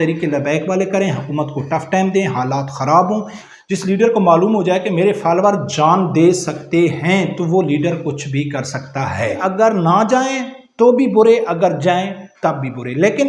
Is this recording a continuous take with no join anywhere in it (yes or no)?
no